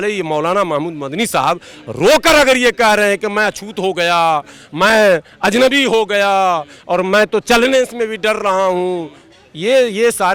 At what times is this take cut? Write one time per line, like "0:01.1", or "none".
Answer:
none